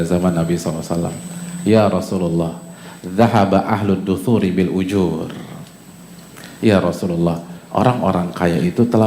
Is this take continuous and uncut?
yes; 0 cuts

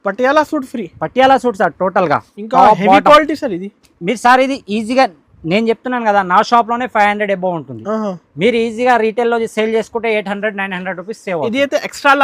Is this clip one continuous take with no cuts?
yes; 0 cuts

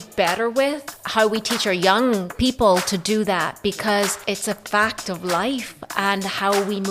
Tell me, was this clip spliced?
yes; 2 cuts; at 0.9 s, 4.2 s

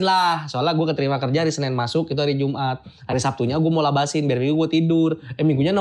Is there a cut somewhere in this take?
no; 0 cuts

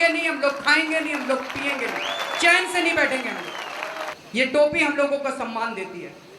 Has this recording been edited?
yes; 1 cut; at 4.1 s

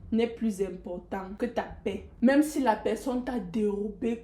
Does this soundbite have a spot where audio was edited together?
yes; 2 cuts; at 1.3 s, 2.1 s

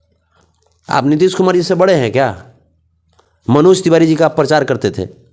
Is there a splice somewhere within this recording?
no; 0 cuts

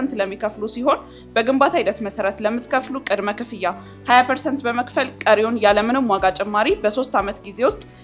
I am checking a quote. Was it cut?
no; 0 cuts

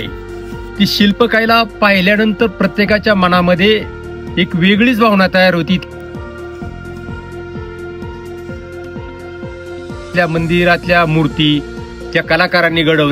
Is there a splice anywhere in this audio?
yes; 2 cuts; at 5.8 s, 10.1 s

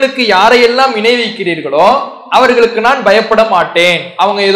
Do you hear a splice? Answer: no; 0 cuts

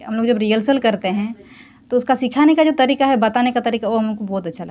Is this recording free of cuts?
yes; 0 cuts

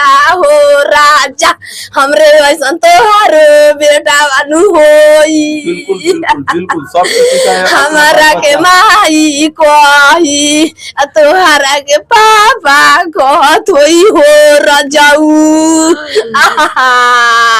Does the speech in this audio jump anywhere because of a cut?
no; 0 cuts

